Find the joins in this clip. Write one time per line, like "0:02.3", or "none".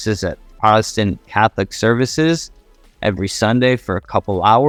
none